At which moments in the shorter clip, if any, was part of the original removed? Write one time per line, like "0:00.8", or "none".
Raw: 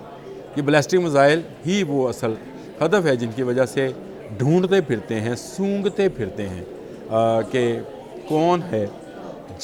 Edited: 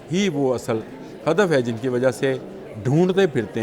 none